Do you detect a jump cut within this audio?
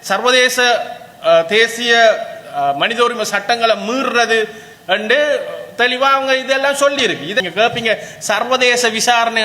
yes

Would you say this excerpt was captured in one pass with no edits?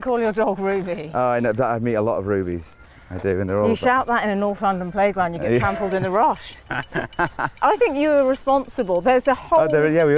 no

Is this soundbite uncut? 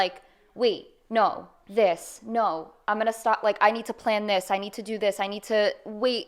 yes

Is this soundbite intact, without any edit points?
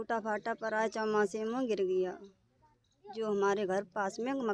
yes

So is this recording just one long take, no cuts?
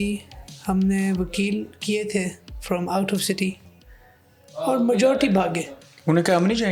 yes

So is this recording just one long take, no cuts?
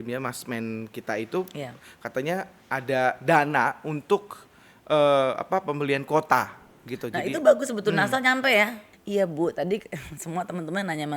no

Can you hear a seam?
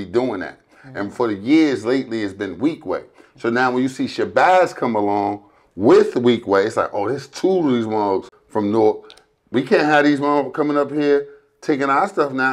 yes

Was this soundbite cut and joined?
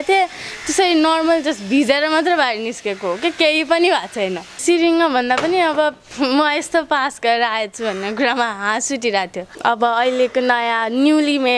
yes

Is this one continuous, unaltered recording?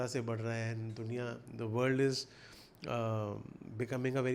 yes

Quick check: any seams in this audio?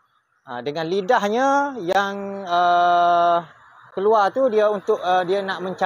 no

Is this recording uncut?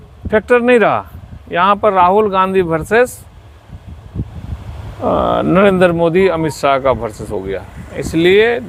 yes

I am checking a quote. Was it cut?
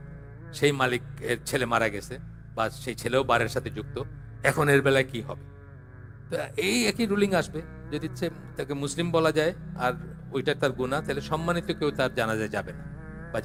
no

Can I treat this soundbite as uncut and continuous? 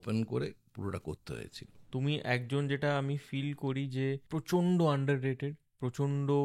no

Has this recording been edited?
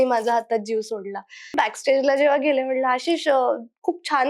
yes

